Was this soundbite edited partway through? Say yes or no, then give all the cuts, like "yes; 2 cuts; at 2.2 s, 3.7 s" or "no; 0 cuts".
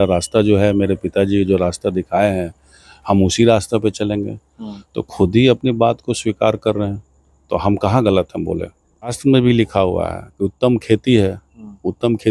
yes; 1 cut; at 9.2 s